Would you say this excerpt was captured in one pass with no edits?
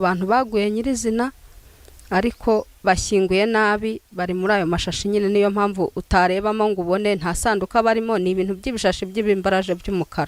yes; 0 cuts

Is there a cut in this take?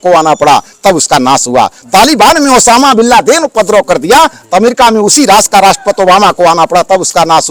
no; 0 cuts

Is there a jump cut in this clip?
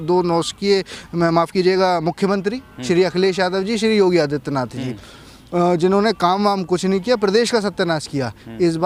no; 0 cuts

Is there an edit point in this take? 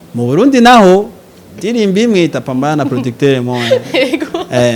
no; 0 cuts

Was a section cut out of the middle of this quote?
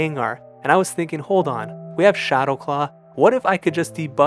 no; 0 cuts

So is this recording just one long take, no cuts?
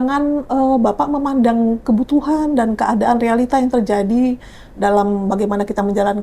yes; 0 cuts

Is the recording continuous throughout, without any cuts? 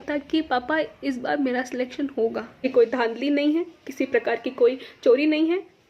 no; 1 cut; at 2.6 s

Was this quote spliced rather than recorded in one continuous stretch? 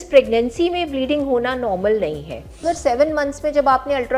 yes; 1 cut; at 2.7 s

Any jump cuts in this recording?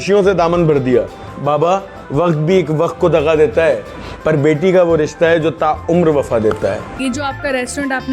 yes; 2 cuts; at 1.2 s, 6.9 s

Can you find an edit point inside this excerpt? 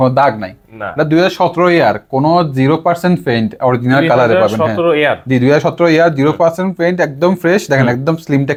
no; 0 cuts

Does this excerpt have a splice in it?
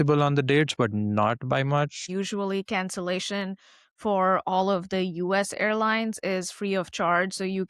yes; 1 cut; at 2.1 s

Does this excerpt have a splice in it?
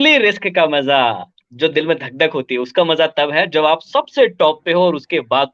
no; 0 cuts

